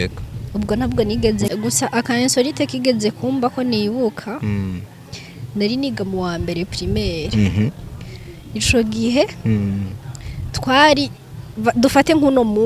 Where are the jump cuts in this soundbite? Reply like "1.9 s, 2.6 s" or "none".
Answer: 1.5 s